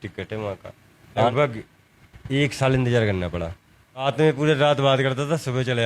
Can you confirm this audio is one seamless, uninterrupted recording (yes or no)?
no